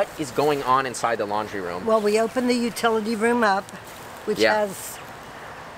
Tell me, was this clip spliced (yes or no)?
no